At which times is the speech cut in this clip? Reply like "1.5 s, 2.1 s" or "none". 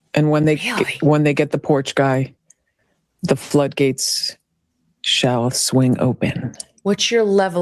none

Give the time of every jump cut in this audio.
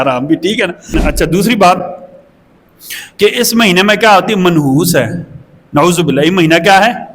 1.0 s

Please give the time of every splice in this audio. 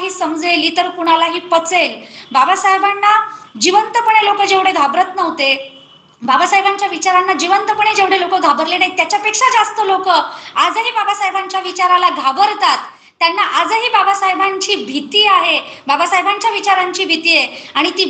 none

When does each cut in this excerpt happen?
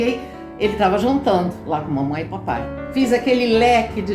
2.8 s

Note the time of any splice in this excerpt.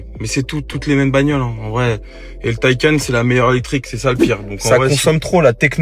4.6 s

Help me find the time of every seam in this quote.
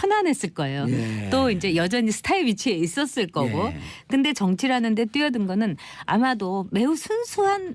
3.7 s

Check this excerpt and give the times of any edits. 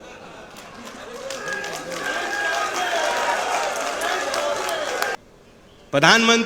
5.2 s

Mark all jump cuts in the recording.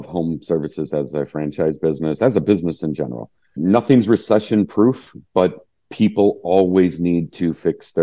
3.6 s

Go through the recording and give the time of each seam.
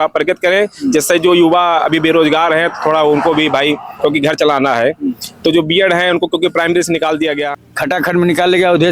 7.6 s

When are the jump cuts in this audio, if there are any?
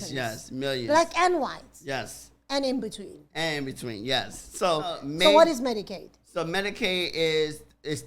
none

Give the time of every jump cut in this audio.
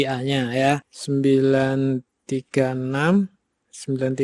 0.9 s

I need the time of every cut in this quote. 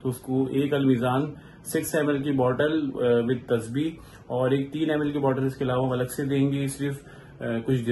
none

